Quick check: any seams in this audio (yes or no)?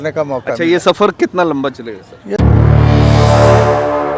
yes